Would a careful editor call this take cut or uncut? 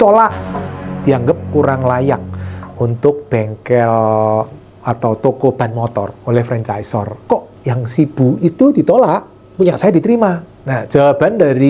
cut